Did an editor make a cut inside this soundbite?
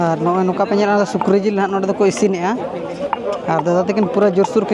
no; 0 cuts

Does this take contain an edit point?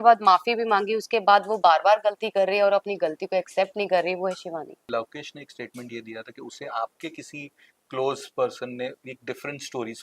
yes; 1 cut; at 4.9 s

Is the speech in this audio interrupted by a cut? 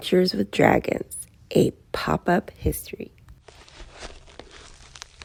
no; 0 cuts

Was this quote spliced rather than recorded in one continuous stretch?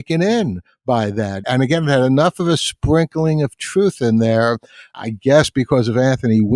yes; 2 cuts; at 1.4 s, 4.9 s

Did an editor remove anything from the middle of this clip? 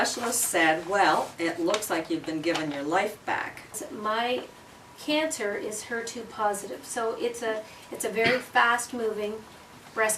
yes; 1 cut; at 3.7 s

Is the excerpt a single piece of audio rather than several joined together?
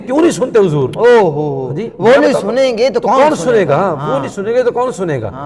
yes; 0 cuts

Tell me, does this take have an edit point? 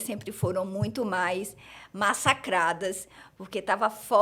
no; 0 cuts

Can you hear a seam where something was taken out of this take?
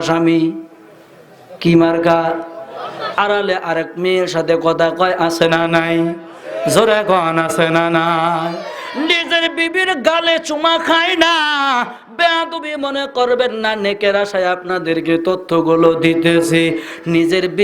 yes; 1 cut; at 3.2 s

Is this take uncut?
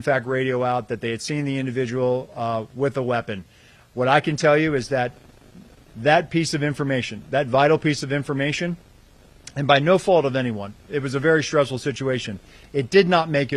yes; 0 cuts

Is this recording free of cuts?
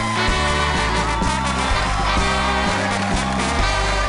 yes; 0 cuts

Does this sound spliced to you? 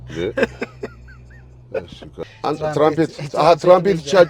yes; 1 cut; at 2.2 s

